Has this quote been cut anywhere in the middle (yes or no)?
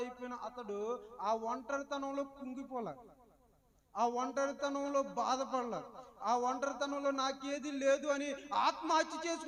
no